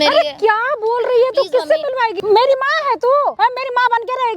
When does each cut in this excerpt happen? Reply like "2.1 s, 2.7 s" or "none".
2.1 s, 3.3 s